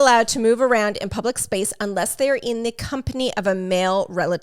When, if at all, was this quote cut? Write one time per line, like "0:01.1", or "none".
none